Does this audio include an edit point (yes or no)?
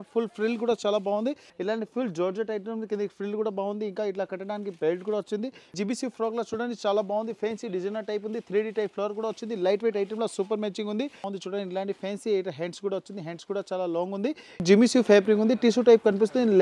yes